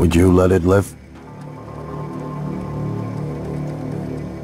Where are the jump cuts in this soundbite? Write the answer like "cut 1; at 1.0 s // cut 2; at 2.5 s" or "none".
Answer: cut 1; at 1.1 s